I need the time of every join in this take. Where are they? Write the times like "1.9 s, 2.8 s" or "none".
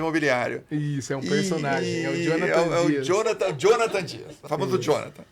4.3 s